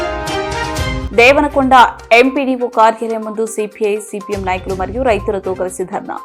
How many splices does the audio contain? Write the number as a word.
one